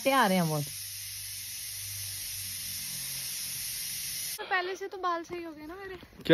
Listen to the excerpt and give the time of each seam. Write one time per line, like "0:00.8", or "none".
0:04.4